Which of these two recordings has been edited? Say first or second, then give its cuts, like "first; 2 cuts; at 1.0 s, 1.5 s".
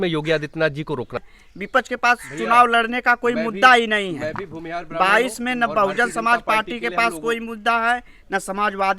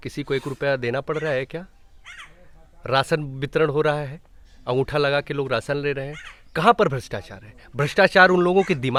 first; 1 cut; at 1.3 s